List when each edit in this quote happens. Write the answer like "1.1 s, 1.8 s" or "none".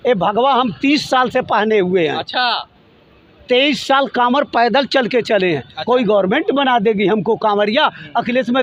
none